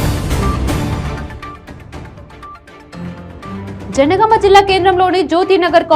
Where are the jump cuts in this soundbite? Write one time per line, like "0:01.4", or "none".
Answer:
0:03.8